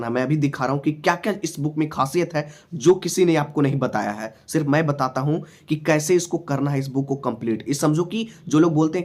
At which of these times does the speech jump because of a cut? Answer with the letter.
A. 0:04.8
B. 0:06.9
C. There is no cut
C